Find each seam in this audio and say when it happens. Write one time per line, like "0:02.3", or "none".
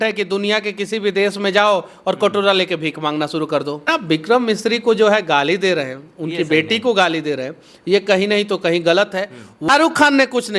0:03.9
0:09.7